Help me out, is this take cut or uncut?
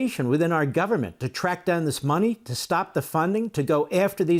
uncut